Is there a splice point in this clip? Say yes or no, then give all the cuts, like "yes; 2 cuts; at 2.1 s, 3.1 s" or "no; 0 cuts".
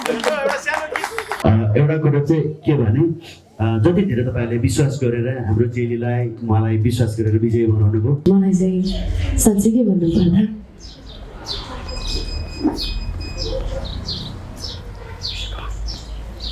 yes; 2 cuts; at 1.2 s, 8.2 s